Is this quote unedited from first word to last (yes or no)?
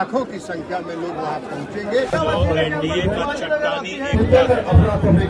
no